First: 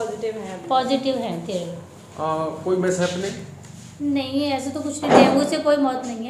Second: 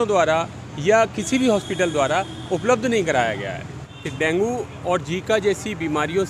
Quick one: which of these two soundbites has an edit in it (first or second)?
second